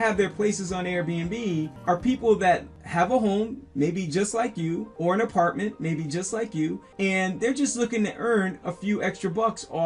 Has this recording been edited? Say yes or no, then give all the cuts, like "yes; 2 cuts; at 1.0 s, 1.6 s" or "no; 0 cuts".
yes; 4 cuts; at 1.7 s, 2.8 s, 4.9 s, 6.9 s